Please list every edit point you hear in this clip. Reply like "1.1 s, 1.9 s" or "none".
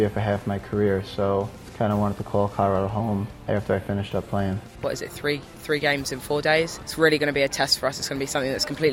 1.6 s, 3.4 s, 4.8 s, 6.8 s